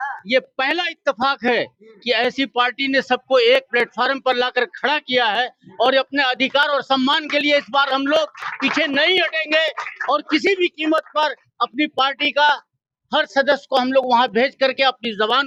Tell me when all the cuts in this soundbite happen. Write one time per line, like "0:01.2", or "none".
none